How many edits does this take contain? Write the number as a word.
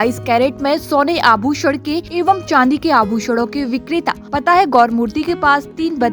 two